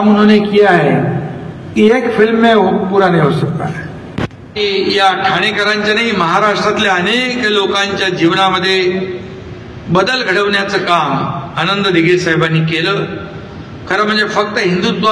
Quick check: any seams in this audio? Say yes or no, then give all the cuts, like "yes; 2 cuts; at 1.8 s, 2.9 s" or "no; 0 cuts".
yes; 1 cut; at 4.6 s